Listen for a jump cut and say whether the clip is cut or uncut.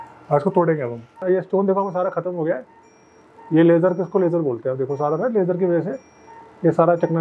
cut